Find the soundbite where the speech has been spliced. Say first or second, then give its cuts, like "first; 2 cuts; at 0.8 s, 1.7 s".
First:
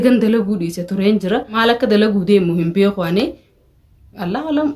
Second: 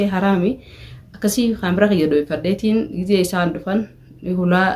first; 1 cut; at 1.6 s